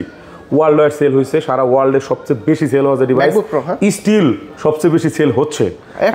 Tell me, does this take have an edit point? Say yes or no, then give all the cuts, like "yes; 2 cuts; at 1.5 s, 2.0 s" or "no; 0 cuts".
no; 0 cuts